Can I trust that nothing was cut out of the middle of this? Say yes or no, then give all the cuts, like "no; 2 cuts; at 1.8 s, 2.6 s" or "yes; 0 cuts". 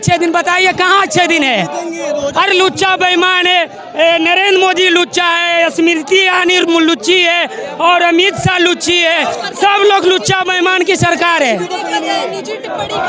yes; 0 cuts